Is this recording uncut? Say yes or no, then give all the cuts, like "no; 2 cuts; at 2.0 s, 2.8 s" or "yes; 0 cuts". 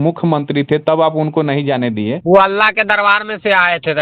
no; 1 cut; at 2.2 s